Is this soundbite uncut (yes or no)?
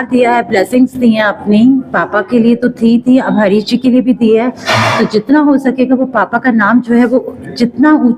yes